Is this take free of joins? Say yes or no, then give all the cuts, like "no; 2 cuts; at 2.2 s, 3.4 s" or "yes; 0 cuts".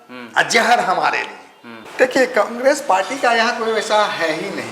no; 1 cut; at 1.8 s